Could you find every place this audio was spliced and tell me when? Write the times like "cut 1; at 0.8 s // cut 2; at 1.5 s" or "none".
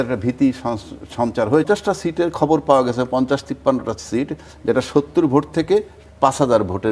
cut 1; at 1.6 s